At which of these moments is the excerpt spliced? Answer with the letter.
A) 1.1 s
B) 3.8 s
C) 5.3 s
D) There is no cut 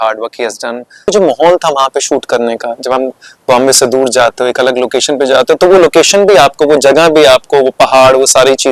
A